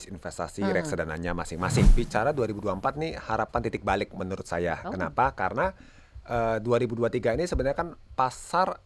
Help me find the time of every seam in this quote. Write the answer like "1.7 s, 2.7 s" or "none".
1.9 s